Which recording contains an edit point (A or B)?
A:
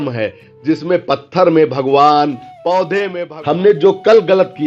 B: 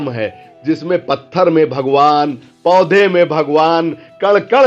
A